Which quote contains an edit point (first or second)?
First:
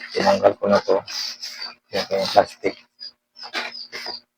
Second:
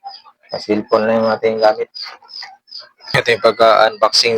second